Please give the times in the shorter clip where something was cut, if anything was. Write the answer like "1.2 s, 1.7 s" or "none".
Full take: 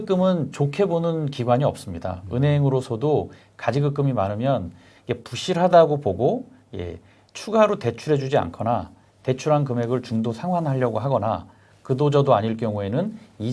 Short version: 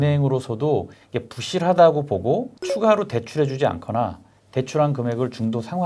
1.0 s, 2.6 s